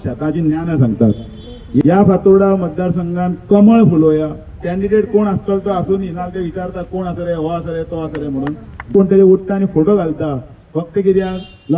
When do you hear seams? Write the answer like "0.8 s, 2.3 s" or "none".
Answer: 1.8 s, 8.9 s